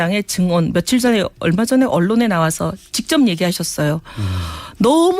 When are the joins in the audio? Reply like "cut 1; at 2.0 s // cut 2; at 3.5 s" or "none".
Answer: cut 1; at 2.2 s

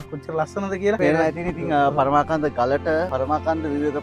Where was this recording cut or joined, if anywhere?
cut 1; at 1.0 s // cut 2; at 3.1 s

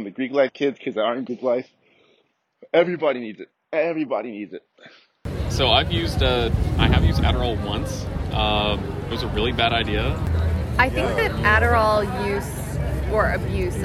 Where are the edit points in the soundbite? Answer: cut 1; at 5.3 s // cut 2; at 10.3 s

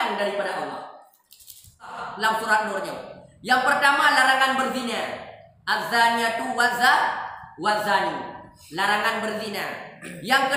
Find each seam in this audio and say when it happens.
cut 1; at 2.0 s

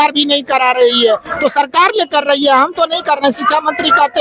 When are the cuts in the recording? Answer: none

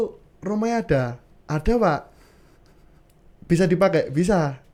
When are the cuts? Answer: none

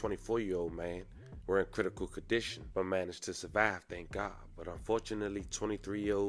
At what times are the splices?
none

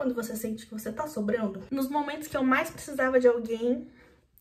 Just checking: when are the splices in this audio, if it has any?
cut 1; at 1.6 s

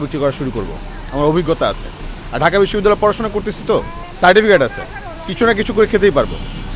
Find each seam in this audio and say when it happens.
cut 1; at 4.0 s

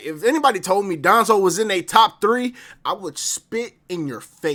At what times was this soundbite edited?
none

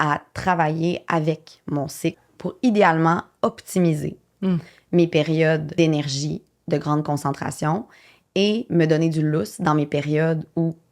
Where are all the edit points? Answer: cut 1; at 2.3 s // cut 2; at 5.7 s

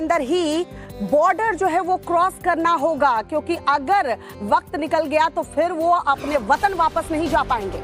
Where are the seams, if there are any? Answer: none

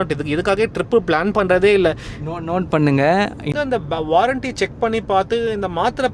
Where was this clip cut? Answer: cut 1; at 3.5 s

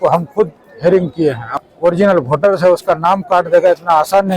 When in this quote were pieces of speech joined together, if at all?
cut 1; at 1.7 s

